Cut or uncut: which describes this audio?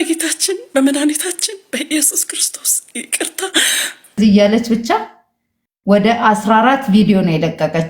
cut